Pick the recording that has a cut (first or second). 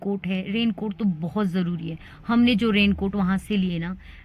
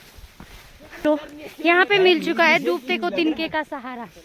second